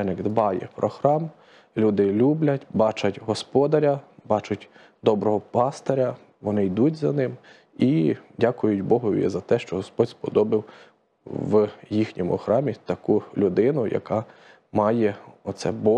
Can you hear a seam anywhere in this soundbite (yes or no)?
no